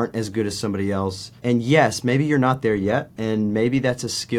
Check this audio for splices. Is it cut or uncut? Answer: cut